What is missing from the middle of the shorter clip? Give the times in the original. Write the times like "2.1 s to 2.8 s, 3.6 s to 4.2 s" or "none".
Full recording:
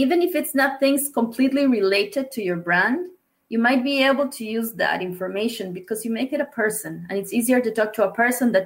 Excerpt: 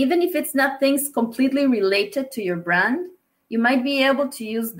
none